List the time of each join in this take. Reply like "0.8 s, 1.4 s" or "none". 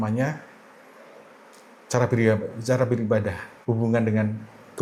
none